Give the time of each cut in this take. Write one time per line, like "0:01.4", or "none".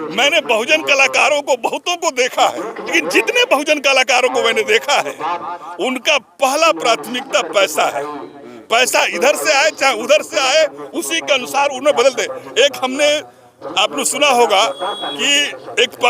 0:02.9

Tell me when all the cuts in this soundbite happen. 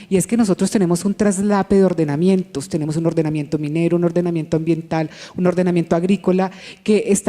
0:04.3

